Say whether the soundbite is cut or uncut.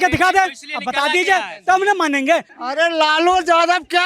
cut